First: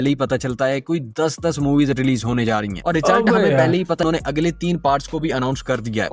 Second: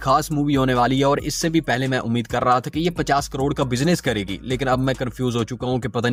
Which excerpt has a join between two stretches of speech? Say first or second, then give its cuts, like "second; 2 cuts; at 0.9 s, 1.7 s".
first; 1 cut; at 4.0 s